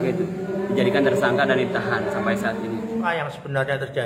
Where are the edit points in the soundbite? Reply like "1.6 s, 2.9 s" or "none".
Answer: 3.1 s